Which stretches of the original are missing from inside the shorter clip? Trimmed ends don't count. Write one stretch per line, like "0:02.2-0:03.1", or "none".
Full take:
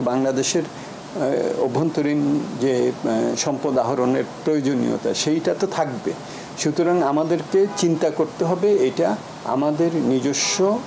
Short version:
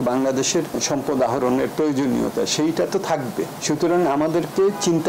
0:00.8-0:03.4
0:04.3-0:04.4
0:06.2-0:06.5